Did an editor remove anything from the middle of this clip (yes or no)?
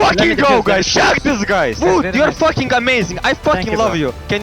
yes